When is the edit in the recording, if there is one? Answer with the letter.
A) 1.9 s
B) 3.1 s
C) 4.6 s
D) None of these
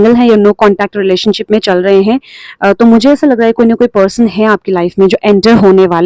D